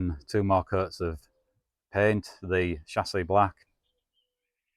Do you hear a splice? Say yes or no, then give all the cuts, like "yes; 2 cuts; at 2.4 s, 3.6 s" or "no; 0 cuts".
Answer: yes; 1 cut; at 3.7 s